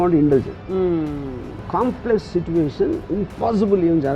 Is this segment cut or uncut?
cut